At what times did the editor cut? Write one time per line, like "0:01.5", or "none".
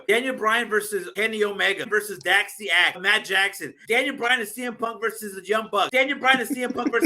0:01.1
0:01.9
0:03.3
0:05.9